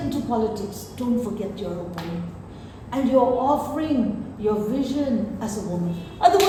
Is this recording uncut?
yes; 0 cuts

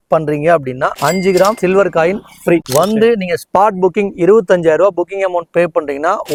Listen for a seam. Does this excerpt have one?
no; 0 cuts

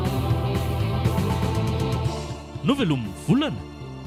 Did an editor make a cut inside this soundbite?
no; 0 cuts

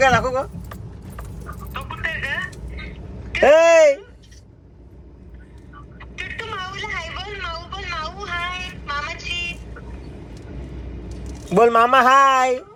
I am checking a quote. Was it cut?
no; 0 cuts

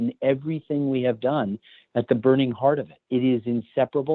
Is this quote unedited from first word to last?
yes; 0 cuts

